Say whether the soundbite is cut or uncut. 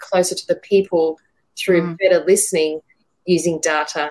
cut